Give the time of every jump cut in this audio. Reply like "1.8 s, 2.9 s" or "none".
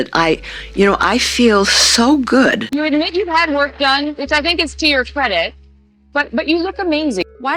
2.7 s

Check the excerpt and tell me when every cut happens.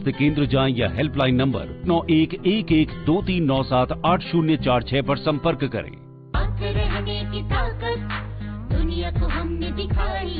5.8 s

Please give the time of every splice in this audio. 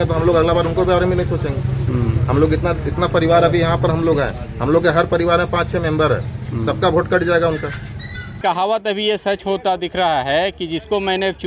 8.4 s

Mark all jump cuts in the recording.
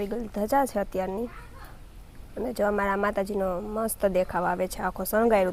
none

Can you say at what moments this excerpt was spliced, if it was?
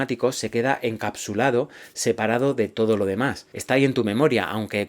3.5 s

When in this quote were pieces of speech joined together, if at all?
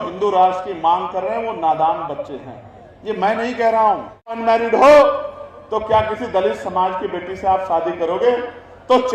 4.3 s

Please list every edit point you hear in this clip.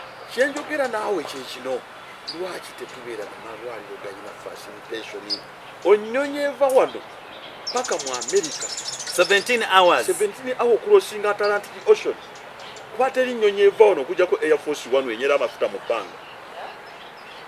none

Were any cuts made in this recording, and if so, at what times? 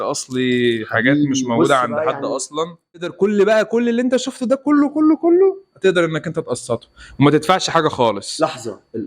3.1 s

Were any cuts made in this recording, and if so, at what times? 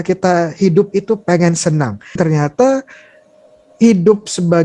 2.1 s

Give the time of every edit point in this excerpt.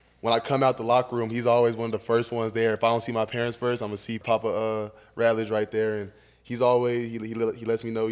4.2 s

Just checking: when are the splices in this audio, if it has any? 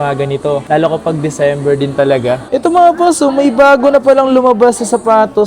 2.4 s

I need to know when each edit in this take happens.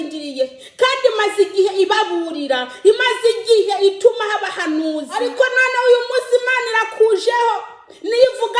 5.2 s

